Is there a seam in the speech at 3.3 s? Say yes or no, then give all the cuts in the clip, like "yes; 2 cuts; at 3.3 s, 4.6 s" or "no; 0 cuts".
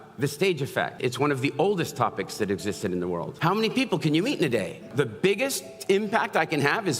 yes; 3 cuts; at 1.0 s, 3.3 s, 4.9 s